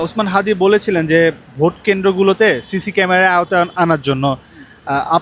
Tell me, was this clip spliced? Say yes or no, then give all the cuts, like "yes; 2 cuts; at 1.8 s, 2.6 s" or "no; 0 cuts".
no; 0 cuts